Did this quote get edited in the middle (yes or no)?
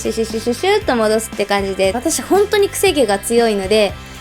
yes